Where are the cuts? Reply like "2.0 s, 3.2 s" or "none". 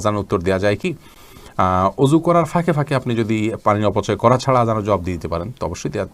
none